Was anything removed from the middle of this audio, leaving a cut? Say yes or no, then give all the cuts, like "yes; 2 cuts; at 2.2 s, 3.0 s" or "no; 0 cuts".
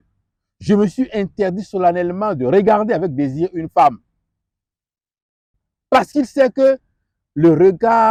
no; 0 cuts